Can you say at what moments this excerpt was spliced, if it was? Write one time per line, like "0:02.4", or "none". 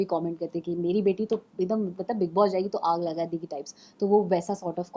none